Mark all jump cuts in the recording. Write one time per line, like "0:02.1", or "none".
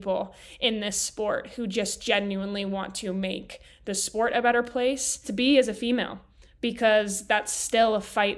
0:05.3